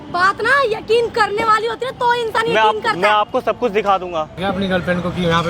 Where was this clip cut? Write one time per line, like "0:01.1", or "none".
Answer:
0:04.4